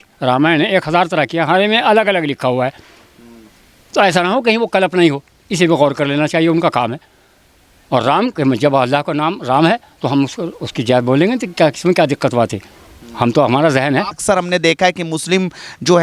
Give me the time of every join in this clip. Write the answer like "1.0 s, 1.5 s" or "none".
14.2 s